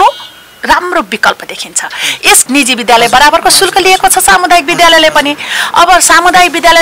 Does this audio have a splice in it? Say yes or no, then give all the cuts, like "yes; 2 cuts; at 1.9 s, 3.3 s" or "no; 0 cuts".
yes; 1 cut; at 2.4 s